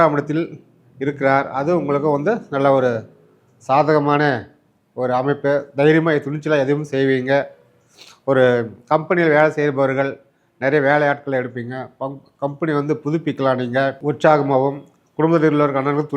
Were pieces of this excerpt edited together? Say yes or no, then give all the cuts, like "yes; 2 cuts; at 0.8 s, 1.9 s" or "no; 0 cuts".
yes; 1 cut; at 14.0 s